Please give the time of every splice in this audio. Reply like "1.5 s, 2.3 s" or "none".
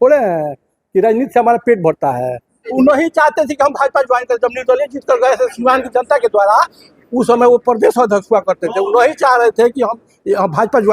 2.7 s